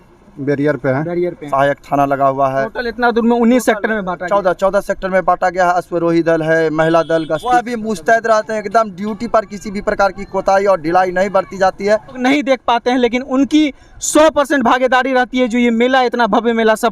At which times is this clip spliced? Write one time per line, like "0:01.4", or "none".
0:01.5
0:07.5
0:12.2